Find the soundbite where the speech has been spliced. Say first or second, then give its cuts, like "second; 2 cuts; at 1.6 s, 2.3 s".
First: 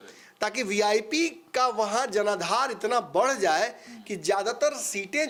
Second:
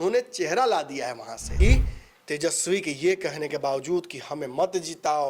second; 1 cut; at 1.5 s